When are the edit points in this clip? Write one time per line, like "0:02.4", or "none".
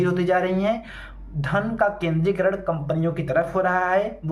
none